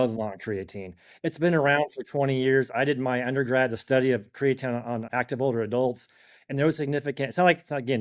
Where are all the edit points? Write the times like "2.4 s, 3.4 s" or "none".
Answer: 5.1 s